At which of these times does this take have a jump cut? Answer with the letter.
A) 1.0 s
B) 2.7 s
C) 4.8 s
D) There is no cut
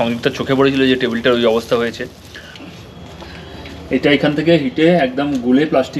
B